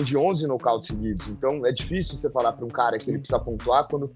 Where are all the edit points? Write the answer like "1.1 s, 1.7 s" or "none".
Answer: none